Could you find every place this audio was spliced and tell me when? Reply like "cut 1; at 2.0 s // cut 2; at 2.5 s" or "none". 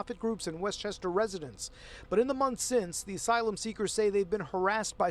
cut 1; at 2.2 s